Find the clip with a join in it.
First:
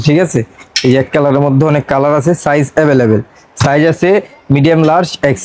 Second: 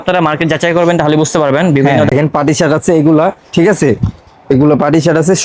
second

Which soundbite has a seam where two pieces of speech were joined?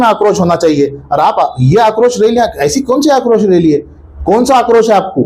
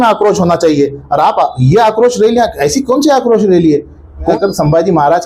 second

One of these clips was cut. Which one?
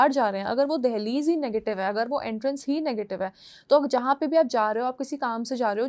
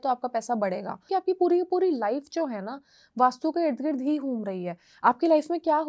second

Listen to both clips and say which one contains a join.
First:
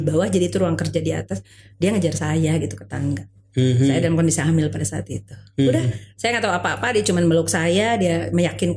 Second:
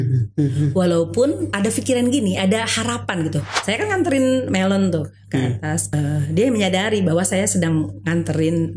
second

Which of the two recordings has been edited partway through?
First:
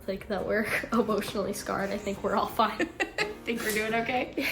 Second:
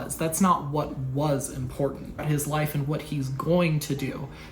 second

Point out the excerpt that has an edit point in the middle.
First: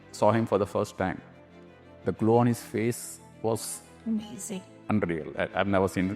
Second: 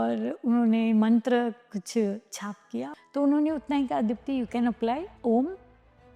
second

